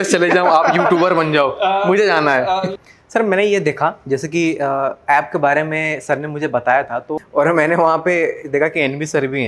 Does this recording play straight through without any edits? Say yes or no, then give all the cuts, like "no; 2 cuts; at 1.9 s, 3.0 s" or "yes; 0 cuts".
no; 2 cuts; at 2.7 s, 7.0 s